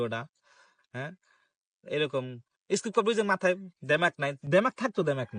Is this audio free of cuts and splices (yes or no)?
yes